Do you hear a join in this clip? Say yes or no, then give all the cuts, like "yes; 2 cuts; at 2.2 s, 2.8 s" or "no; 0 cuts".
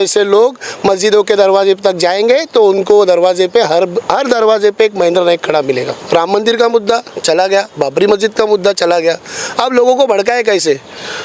yes; 1 cut; at 5.9 s